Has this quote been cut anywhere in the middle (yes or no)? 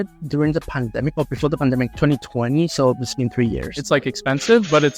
yes